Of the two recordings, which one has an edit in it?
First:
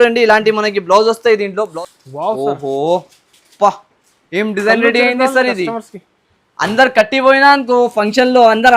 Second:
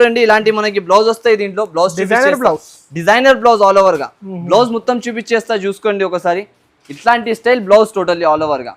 first; 1 cut; at 1.7 s

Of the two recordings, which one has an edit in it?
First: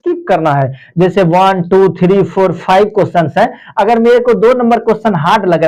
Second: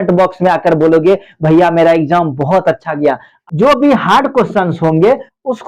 second; 1 cut; at 3.4 s

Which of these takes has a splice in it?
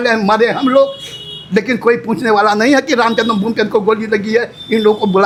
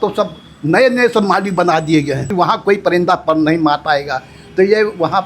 second; 1 cut; at 2.3 s

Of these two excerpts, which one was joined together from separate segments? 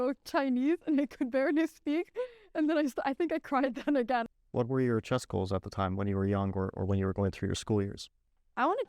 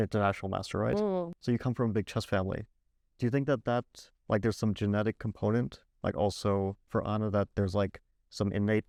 first; 1 cut; at 4.2 s

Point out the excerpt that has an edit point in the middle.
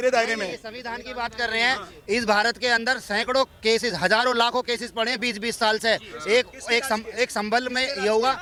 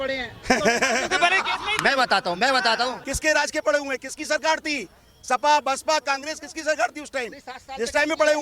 second; 1 cut; at 3.1 s

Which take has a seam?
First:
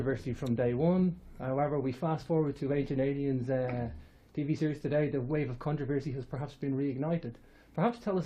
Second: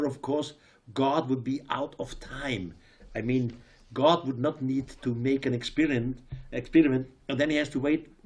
second; 1 cut; at 6.6 s

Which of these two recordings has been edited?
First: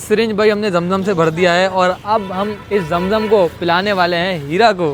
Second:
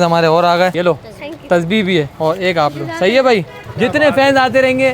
second; 3 cuts; at 0.7 s, 2.1 s, 3.6 s

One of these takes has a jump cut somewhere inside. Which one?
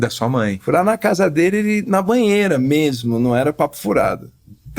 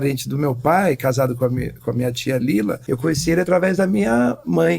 second; 1 cut; at 2.8 s

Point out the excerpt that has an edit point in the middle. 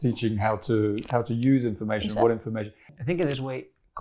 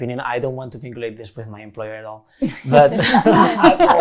first; 1 cut; at 2.8 s

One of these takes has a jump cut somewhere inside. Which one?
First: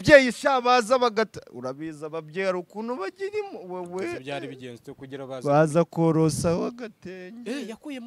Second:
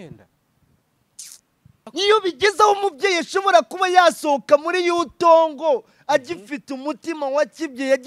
second; 1 cut; at 1.9 s

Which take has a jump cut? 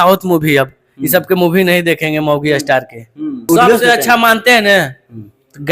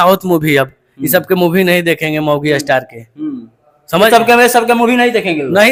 first; 1 cut; at 3.4 s

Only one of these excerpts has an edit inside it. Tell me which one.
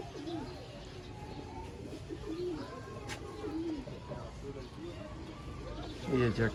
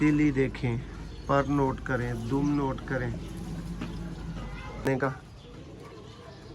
second; 1 cut; at 4.9 s

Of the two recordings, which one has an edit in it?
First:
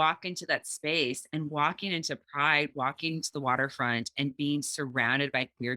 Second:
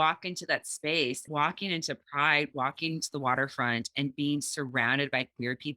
second; 1 cut; at 1.3 s

